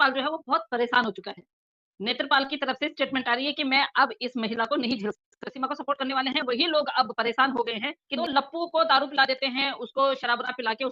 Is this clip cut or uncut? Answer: cut